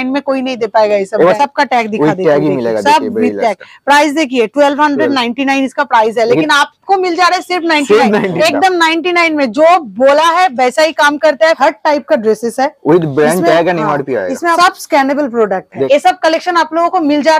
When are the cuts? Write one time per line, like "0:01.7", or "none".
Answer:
0:01.4
0:08.3
0:11.6
0:14.6
0:15.9

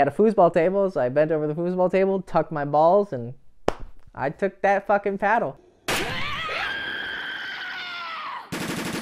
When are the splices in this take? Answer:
0:05.7

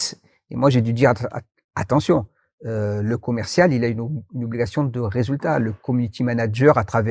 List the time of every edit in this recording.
none

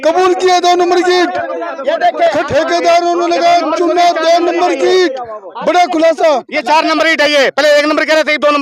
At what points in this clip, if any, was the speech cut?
0:02.5

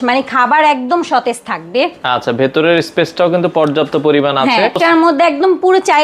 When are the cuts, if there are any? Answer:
0:04.8

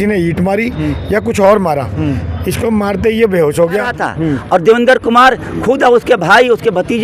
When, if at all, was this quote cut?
0:04.0

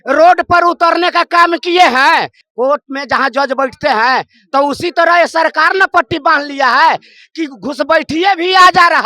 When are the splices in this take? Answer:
0:02.4

